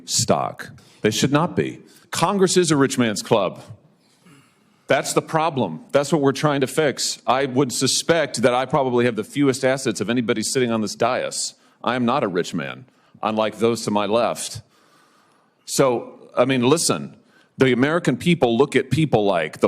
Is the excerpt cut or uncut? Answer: cut